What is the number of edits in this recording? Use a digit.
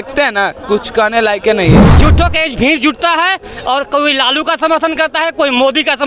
1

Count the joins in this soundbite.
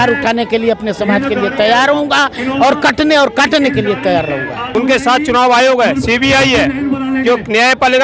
1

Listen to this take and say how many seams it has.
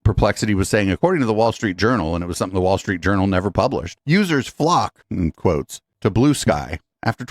1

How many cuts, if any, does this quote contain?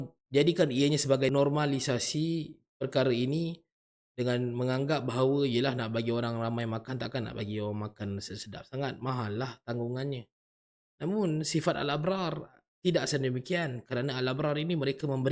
1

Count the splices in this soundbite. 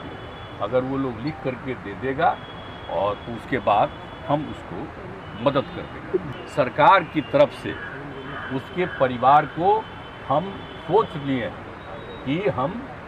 1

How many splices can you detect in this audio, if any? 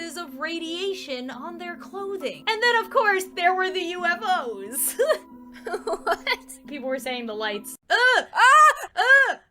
1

